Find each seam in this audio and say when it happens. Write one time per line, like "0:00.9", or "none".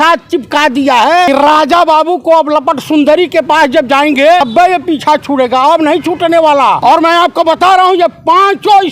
0:01.3
0:04.4
0:06.8